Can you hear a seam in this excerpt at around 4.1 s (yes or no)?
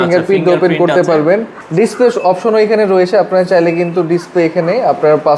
no